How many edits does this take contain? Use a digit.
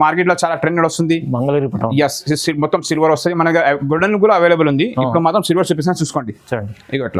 0